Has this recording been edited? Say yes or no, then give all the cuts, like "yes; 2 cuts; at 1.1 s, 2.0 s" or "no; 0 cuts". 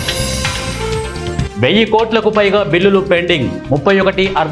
no; 0 cuts